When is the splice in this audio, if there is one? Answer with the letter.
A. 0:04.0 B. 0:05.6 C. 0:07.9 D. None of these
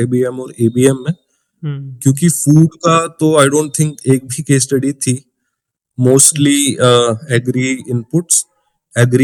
D